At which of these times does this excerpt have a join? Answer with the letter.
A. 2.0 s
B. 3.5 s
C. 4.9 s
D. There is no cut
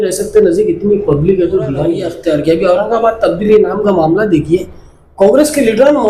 A